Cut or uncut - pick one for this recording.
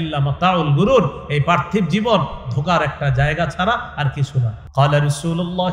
cut